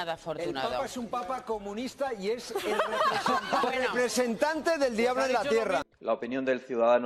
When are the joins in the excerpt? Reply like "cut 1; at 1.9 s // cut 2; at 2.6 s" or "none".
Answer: cut 1; at 6.0 s

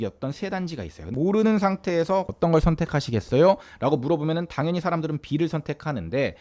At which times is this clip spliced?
cut 1; at 1.1 s

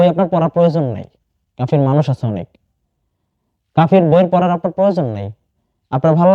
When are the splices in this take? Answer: none

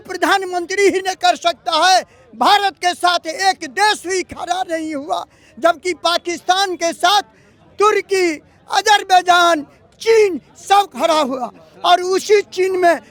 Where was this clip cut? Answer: none

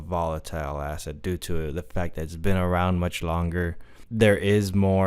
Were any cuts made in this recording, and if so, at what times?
cut 1; at 4.0 s

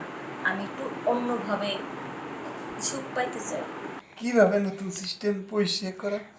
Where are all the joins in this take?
cut 1; at 4.0 s

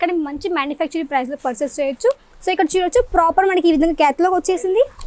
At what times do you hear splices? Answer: cut 1; at 2.3 s

